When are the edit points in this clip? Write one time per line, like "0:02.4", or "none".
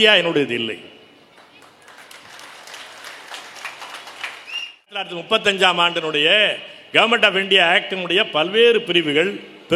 0:05.1